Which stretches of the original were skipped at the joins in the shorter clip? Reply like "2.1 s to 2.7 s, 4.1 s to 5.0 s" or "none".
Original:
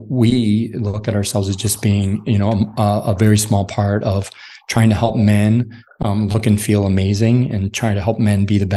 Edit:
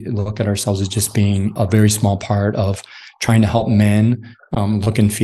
2.2 s to 3.0 s